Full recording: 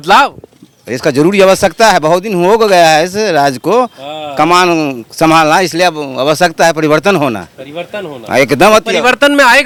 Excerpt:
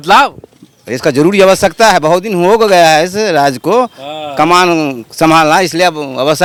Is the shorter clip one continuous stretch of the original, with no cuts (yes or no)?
yes